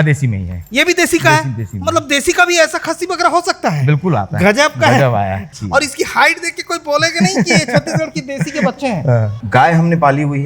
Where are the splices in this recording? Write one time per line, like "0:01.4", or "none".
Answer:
0:05.5
0:09.4